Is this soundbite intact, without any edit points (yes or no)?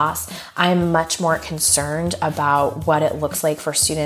yes